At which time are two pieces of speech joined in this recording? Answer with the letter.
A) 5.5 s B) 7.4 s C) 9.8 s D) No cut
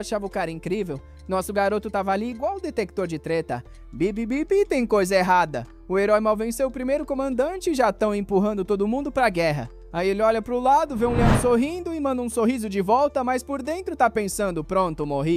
D